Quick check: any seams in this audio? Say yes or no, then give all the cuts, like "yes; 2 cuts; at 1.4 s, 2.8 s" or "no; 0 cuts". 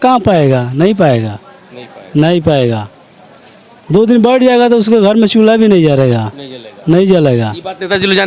no; 0 cuts